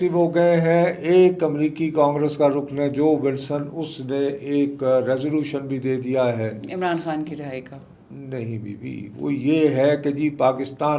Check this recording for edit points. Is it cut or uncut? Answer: uncut